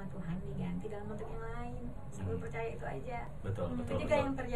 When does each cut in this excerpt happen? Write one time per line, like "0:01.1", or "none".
none